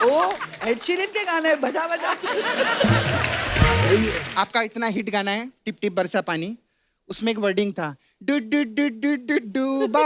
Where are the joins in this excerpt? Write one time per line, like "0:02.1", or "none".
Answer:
0:04.2